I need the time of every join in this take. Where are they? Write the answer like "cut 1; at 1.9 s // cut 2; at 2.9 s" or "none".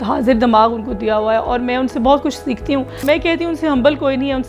cut 1; at 3.0 s